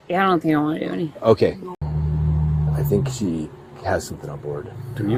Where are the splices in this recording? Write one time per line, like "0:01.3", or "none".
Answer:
0:01.7